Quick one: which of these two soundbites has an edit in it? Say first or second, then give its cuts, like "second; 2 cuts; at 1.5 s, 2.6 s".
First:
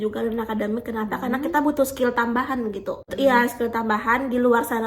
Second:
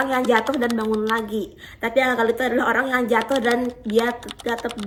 first; 1 cut; at 3.1 s